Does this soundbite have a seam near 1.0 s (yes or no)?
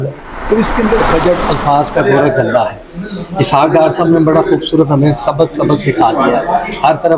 yes